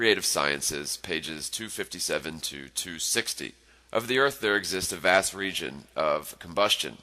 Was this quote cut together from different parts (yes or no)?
no